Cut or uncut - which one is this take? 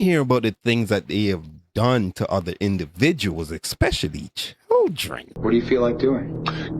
cut